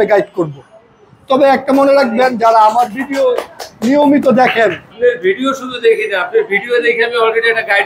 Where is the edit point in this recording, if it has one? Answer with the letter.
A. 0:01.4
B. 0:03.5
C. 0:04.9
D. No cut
C